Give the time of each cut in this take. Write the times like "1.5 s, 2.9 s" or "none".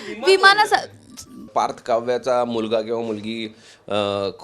1.5 s

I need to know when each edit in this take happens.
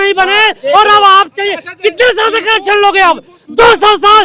none

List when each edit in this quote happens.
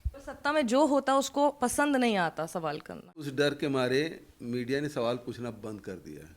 3.2 s

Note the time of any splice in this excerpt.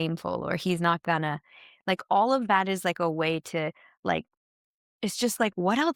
none

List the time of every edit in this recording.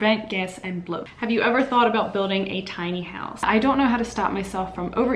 1.1 s, 3.3 s

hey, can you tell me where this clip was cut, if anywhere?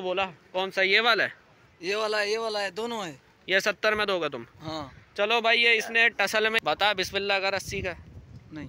6.6 s

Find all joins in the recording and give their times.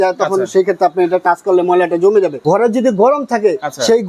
2.3 s

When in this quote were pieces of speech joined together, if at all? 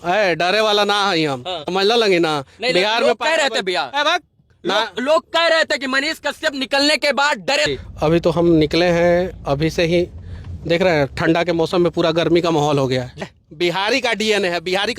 1.6 s, 7.7 s, 13.2 s

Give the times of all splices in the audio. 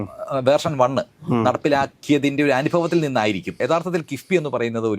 3.5 s

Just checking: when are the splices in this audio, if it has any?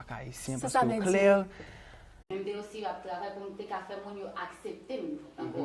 2.2 s

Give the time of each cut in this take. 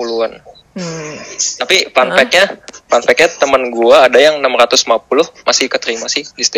1.5 s

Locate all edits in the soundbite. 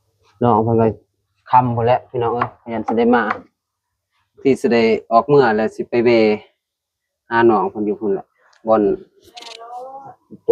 none

